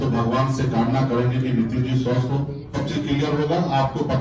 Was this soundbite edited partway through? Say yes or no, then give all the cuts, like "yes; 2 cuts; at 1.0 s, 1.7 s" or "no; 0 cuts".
yes; 1 cut; at 2.7 s